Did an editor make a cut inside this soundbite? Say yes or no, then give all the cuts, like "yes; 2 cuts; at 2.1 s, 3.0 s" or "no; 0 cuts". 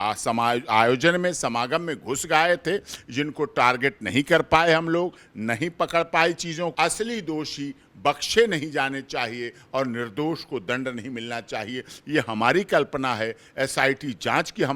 yes; 1 cut; at 6.7 s